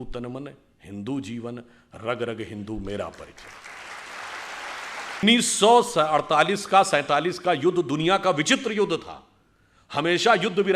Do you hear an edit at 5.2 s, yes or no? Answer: yes